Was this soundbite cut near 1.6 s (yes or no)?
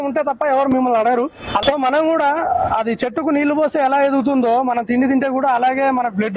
yes